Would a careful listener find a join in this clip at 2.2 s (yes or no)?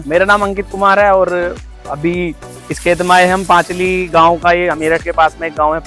no